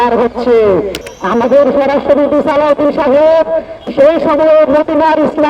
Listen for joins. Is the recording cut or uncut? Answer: cut